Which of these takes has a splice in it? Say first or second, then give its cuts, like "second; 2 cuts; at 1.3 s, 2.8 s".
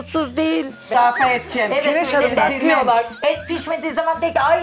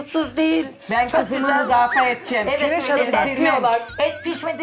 first; 1 cut; at 0.9 s